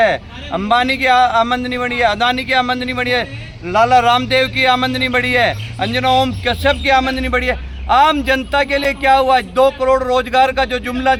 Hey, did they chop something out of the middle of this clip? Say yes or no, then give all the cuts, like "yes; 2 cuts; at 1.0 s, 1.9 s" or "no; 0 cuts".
no; 0 cuts